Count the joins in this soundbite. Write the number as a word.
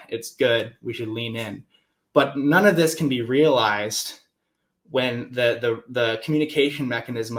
zero